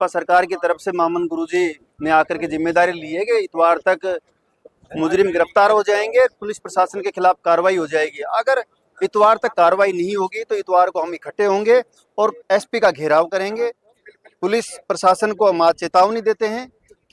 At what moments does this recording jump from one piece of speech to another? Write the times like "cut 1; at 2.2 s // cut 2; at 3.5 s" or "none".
none